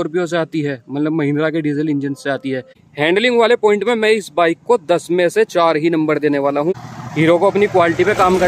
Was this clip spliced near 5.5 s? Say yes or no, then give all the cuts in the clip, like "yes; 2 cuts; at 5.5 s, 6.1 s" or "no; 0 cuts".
no; 2 cuts; at 2.8 s, 6.7 s